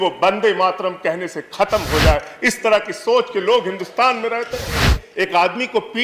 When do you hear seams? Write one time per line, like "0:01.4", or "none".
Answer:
0:05.0